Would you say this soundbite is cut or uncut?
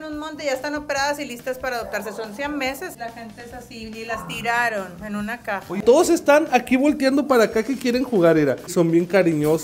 cut